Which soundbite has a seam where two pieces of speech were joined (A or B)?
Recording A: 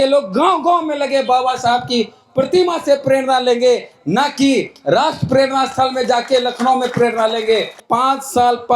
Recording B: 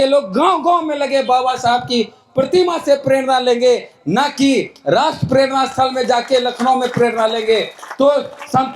A